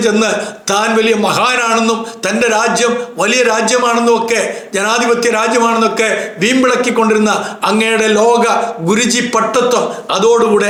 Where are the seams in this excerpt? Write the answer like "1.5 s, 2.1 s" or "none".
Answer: none